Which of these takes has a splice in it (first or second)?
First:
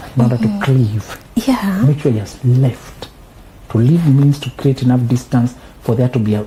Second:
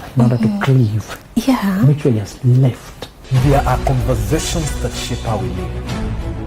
second